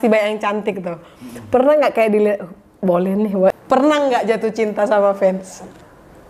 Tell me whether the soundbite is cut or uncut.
cut